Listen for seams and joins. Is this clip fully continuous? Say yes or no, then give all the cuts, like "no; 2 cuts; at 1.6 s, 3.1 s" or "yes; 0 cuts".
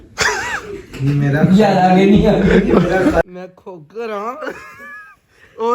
no; 1 cut; at 3.2 s